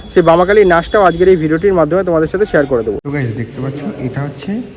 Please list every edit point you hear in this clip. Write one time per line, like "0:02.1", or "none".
0:03.0